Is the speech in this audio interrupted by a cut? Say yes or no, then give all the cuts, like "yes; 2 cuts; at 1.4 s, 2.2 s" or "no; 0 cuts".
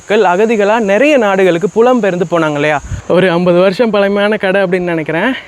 yes; 1 cut; at 2.9 s